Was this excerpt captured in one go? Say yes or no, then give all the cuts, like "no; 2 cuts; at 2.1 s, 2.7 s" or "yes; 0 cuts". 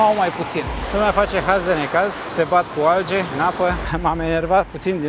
no; 3 cuts; at 0.8 s, 2.2 s, 3.6 s